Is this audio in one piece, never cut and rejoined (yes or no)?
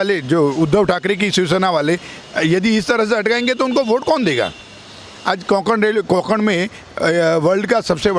yes